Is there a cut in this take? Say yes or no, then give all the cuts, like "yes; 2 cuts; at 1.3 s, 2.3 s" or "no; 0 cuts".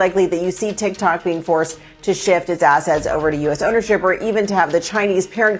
no; 0 cuts